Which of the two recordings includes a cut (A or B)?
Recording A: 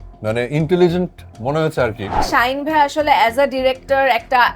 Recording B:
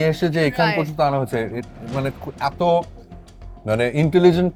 A